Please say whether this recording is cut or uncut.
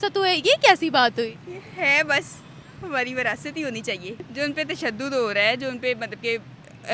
cut